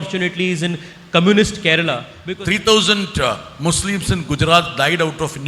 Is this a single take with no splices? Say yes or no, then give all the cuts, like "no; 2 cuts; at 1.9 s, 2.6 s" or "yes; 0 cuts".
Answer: no; 1 cut; at 2.1 s